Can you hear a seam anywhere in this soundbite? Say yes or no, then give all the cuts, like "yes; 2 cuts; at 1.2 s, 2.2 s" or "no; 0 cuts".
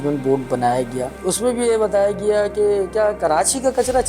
yes; 1 cut; at 1.1 s